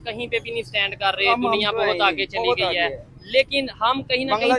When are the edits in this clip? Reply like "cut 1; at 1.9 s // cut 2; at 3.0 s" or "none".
none